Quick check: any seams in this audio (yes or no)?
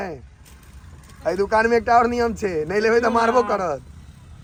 no